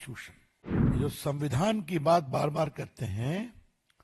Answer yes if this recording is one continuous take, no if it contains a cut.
no